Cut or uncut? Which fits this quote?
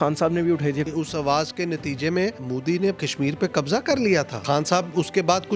cut